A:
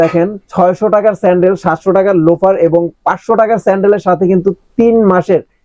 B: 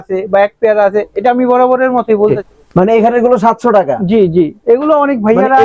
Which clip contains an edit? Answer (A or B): B